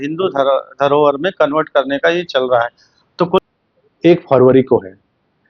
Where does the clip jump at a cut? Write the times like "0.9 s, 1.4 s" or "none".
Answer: 3.4 s